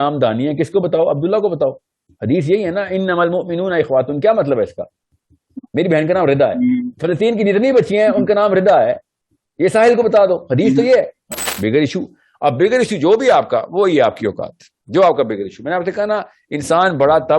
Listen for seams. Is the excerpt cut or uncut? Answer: cut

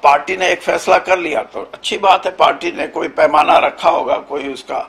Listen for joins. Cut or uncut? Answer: uncut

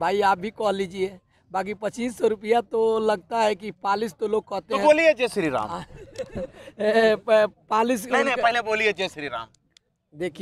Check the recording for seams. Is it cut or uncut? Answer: uncut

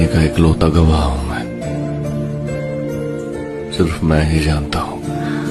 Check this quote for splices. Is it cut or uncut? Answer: uncut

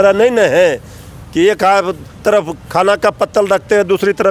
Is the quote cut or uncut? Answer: uncut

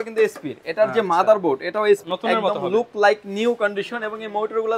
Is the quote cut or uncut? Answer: cut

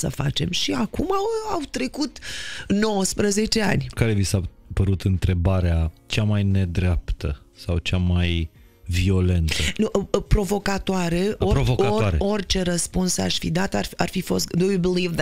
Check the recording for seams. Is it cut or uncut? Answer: cut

